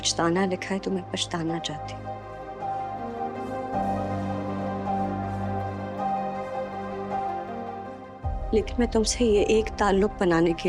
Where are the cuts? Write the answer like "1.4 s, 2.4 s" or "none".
none